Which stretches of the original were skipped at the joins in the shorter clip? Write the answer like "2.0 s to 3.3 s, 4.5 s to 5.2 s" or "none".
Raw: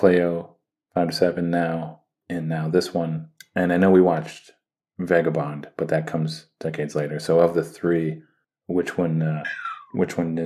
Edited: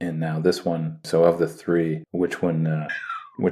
3.3 s to 7.2 s, 8.2 s to 8.6 s